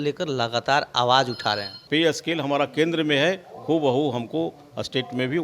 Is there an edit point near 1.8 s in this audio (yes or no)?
yes